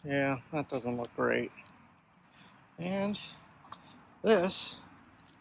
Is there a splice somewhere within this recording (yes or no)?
no